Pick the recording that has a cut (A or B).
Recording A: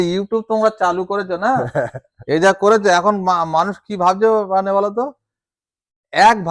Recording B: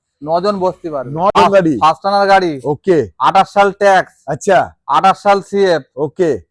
B